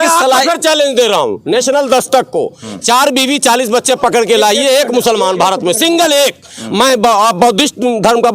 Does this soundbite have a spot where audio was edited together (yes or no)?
no